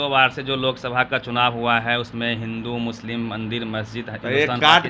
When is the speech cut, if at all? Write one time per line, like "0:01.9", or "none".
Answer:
none